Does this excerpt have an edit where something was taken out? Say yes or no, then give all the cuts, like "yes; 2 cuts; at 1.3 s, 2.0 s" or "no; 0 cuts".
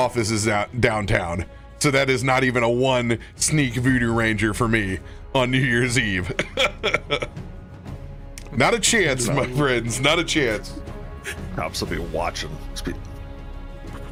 no; 0 cuts